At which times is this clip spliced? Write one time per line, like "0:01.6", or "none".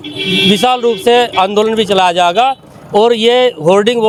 none

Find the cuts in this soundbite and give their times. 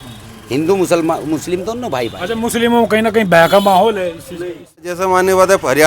0:04.8

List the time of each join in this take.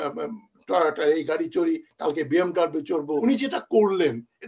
0:03.2

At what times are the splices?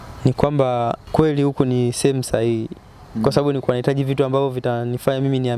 0:01.0

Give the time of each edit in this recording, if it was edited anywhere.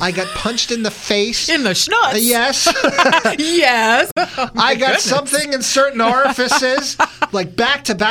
none

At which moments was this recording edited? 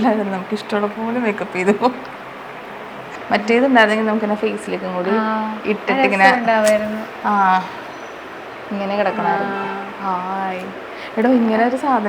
0:02.8

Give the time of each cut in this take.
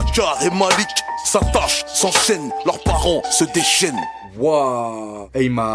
none

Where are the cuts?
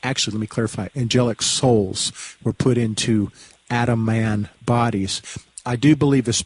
0:02.4

